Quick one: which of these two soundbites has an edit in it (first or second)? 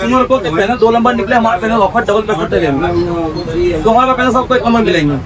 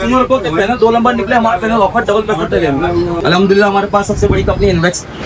second